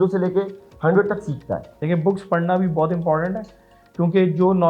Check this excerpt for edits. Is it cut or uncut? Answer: cut